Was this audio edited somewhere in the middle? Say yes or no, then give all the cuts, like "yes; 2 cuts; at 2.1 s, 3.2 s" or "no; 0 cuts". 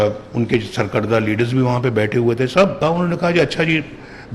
yes; 1 cut; at 2.8 s